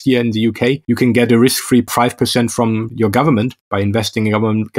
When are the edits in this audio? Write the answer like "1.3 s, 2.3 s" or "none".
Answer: 0.8 s, 1.9 s, 2.9 s